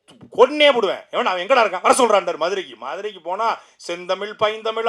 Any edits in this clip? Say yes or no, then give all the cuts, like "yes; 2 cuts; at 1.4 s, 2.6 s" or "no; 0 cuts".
no; 0 cuts